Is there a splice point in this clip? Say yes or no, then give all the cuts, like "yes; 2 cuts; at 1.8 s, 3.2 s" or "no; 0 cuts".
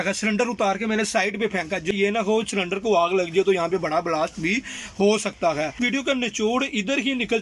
no; 0 cuts